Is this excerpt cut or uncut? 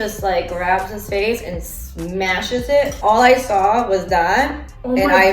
cut